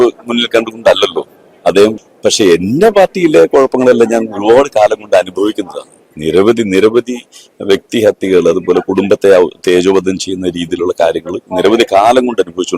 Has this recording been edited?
yes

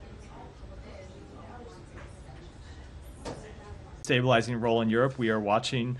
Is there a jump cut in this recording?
no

